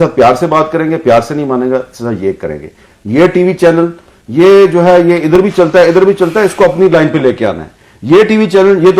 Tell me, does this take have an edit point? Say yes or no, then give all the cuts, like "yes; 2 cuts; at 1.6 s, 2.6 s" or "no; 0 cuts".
no; 0 cuts